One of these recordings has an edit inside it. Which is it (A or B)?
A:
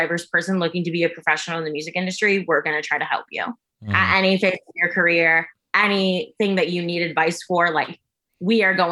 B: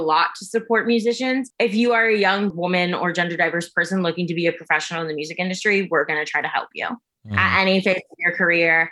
B